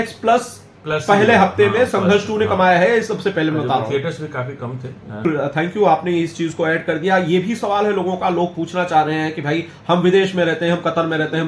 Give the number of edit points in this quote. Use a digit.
1